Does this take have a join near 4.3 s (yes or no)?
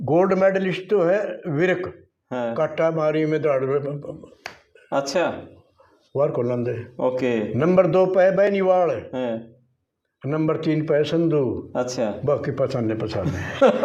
no